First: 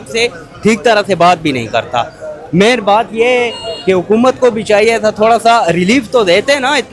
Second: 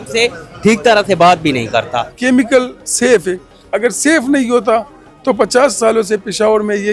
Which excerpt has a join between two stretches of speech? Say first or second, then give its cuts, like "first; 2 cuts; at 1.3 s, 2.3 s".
second; 1 cut; at 2.1 s